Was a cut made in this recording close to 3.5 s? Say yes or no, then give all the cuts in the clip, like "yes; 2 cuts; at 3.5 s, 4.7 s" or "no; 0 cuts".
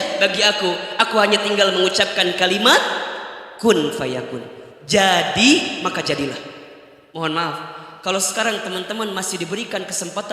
no; 1 cut; at 7.0 s